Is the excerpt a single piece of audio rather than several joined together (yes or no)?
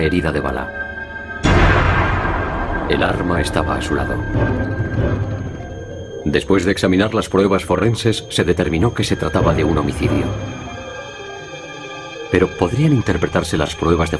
yes